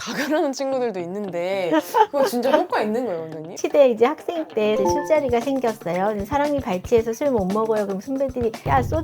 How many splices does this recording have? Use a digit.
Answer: 2